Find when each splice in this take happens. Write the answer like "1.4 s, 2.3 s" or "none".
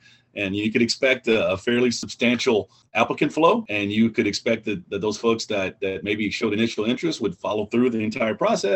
2.6 s, 3.7 s